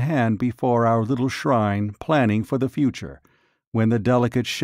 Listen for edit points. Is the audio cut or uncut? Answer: uncut